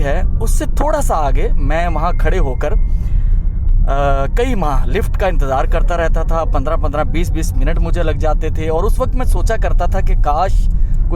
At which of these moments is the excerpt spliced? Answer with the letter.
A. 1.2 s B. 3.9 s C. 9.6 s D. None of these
D